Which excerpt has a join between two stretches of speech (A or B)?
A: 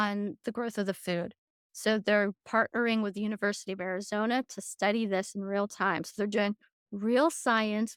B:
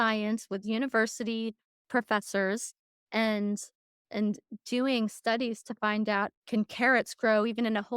B